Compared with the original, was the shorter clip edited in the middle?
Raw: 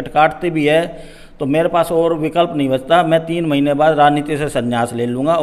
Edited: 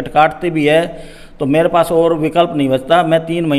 no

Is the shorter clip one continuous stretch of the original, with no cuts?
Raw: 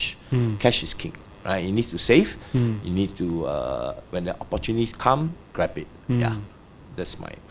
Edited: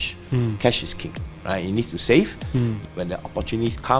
no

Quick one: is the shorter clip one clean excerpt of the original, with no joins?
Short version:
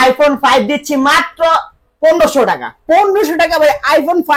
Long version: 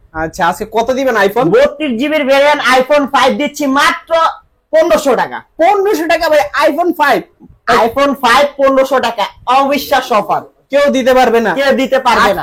yes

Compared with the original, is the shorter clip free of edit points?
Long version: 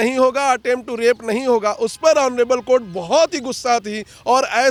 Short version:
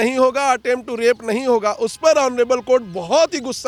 yes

